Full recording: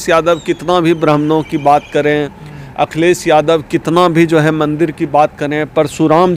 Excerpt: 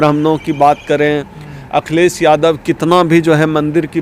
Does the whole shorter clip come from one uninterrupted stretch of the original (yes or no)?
yes